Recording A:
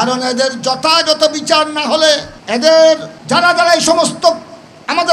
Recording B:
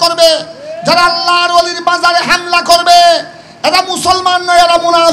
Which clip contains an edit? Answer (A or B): A